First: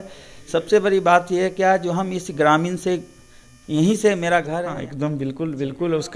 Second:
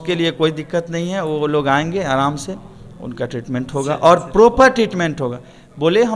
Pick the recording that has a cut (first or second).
first